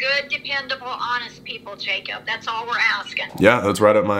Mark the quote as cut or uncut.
cut